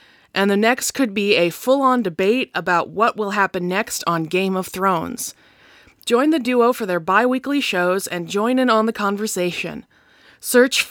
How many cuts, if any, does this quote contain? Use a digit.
0